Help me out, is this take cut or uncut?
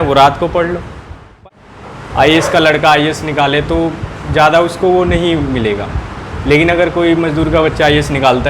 cut